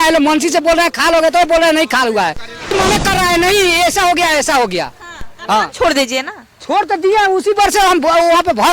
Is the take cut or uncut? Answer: cut